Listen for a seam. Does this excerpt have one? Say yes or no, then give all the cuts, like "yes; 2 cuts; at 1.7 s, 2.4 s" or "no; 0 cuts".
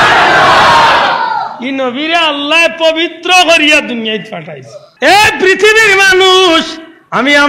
yes; 1 cut; at 4.9 s